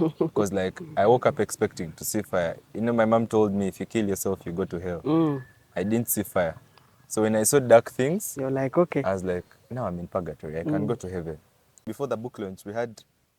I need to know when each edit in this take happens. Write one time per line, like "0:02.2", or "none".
0:11.9